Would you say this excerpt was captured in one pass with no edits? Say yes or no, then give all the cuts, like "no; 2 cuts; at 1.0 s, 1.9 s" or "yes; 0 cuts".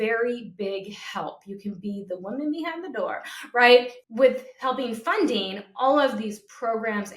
no; 1 cut; at 4.3 s